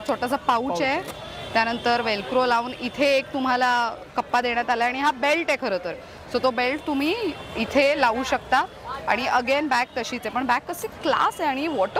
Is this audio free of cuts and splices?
yes; 0 cuts

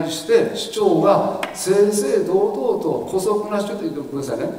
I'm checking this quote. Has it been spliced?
no; 0 cuts

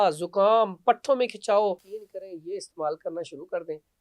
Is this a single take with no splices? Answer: no; 1 cut; at 1.9 s

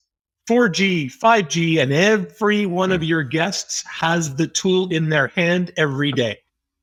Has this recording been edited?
no; 0 cuts

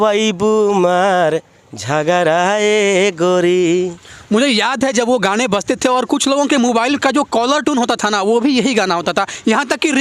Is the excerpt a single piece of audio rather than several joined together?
yes; 0 cuts

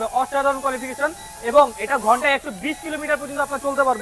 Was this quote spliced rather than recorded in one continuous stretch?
no; 0 cuts

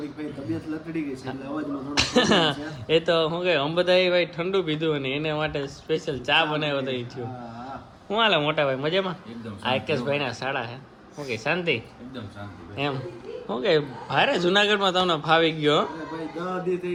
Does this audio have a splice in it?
no; 0 cuts

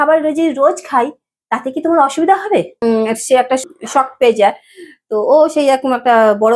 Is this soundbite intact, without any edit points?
no; 2 cuts; at 2.8 s, 3.6 s

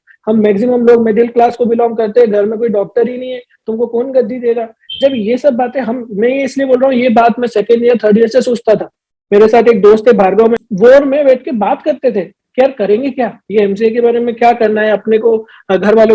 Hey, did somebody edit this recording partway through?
yes; 1 cut; at 10.6 s

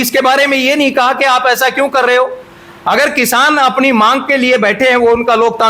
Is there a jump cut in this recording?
no; 0 cuts

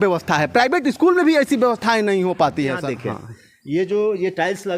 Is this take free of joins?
no; 1 cut; at 2.9 s

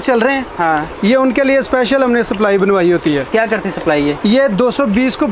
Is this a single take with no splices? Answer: yes; 0 cuts

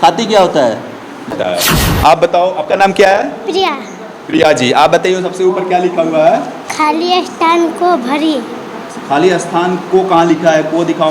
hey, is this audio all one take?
no; 1 cut; at 1.3 s

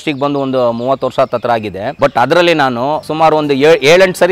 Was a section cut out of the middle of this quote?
yes; 2 cuts; at 1.8 s, 3.0 s

